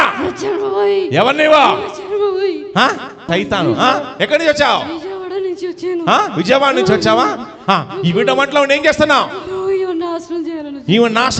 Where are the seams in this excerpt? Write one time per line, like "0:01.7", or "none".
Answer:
0:03.2